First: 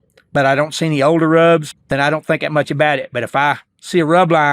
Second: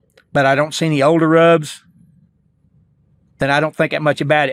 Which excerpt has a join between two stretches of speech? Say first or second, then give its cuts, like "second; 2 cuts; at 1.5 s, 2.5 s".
first; 1 cut; at 1.7 s